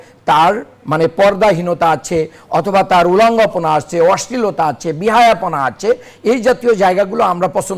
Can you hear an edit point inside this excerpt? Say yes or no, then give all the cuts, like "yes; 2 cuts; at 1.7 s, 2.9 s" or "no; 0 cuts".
no; 0 cuts